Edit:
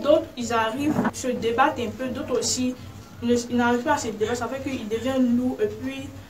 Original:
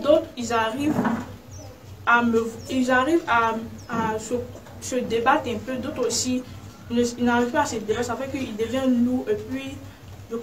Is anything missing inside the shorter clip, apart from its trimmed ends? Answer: yes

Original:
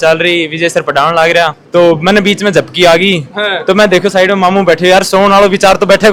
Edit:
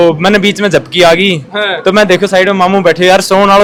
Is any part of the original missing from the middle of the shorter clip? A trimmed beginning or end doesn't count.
no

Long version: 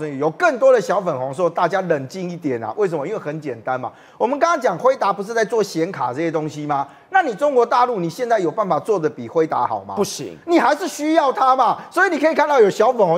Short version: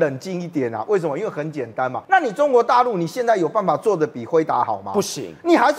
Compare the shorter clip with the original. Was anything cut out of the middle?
yes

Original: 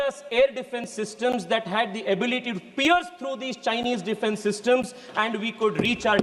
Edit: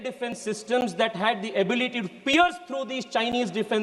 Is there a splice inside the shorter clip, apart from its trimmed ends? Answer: no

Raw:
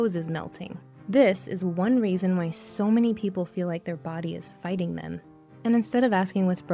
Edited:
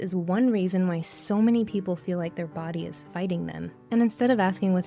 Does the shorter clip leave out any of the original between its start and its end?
yes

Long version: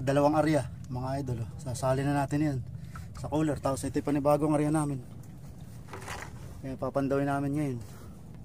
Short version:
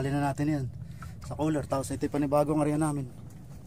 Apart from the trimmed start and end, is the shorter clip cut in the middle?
no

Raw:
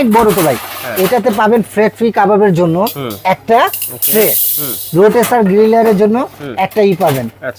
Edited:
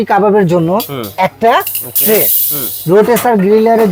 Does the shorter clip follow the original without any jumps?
yes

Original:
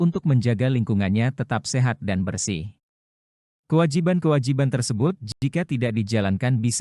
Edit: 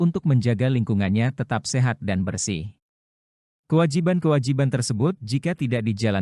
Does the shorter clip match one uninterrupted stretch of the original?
no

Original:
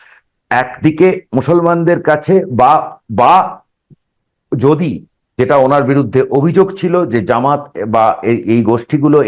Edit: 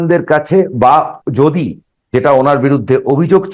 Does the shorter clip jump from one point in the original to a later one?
yes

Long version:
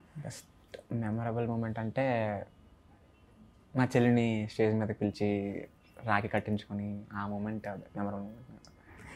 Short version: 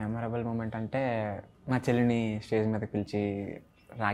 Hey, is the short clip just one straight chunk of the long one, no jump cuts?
no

